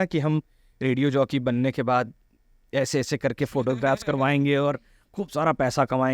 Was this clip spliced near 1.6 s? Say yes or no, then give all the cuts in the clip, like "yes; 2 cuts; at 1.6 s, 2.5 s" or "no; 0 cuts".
no; 0 cuts